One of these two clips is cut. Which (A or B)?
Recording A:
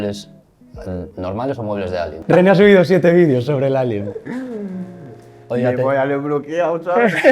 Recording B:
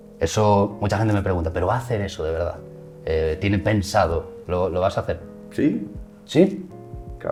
A